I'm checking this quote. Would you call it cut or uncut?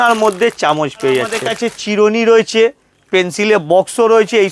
cut